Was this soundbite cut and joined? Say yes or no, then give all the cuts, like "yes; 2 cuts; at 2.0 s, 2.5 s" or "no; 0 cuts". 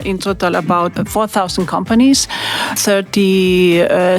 yes; 2 cuts; at 0.9 s, 2.8 s